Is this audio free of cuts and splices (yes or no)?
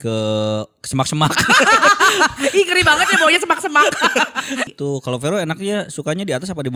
no